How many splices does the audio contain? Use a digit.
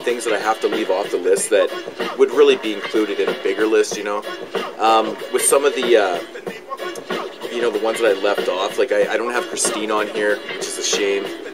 0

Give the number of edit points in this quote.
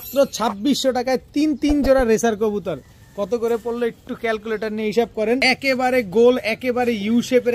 1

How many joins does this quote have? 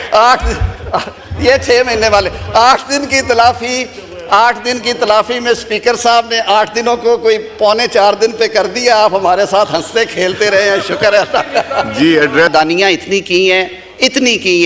1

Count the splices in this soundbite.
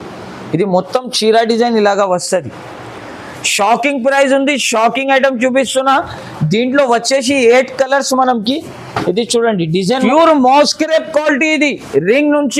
1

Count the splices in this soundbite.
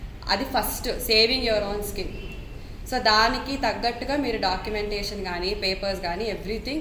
0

